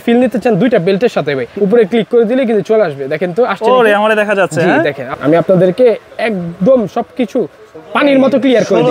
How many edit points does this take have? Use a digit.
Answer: 2